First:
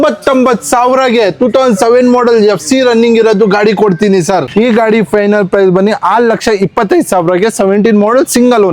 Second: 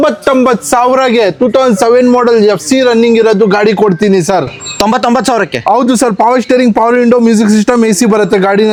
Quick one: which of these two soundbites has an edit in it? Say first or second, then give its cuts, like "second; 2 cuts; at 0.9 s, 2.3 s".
first; 1 cut; at 4.5 s